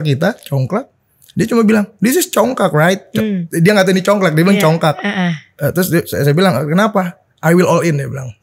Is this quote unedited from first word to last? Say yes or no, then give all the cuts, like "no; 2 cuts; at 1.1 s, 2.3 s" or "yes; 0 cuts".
yes; 0 cuts